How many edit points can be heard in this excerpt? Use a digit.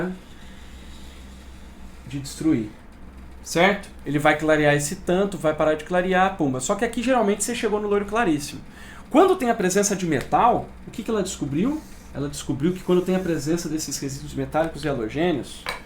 2